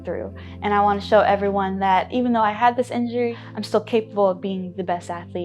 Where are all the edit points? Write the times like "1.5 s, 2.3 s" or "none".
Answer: 3.3 s